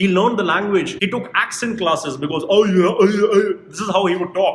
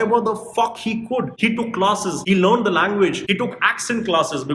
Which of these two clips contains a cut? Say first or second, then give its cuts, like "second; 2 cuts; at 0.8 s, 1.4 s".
second; 1 cut; at 1.3 s